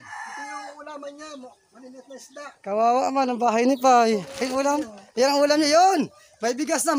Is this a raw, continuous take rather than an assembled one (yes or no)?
yes